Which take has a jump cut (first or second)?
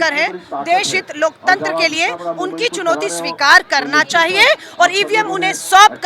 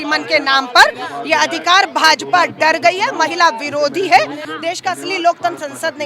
second